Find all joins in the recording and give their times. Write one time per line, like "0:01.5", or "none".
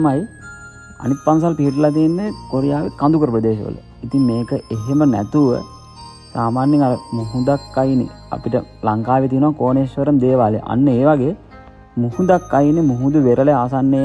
none